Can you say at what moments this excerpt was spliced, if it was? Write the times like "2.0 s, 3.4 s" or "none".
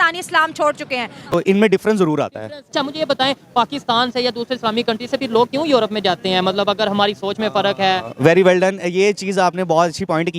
1.1 s

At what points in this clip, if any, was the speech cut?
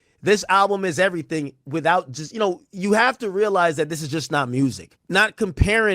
4.9 s

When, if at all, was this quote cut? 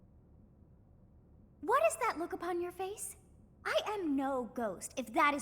1.0 s

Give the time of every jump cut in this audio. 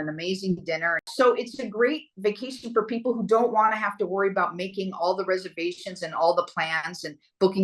1.1 s

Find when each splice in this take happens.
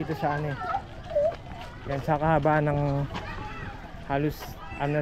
none

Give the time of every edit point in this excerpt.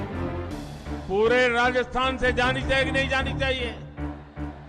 1.0 s, 3.7 s

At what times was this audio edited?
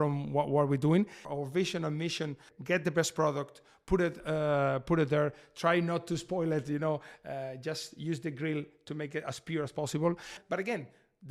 1.3 s, 2.5 s, 10.4 s

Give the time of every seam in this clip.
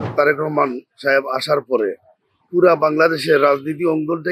none

